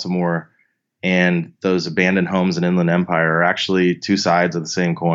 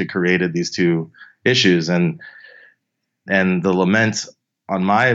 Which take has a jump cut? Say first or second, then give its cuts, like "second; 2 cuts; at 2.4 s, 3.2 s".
second; 1 cut; at 3.3 s